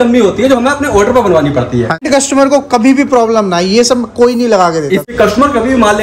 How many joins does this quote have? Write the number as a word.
two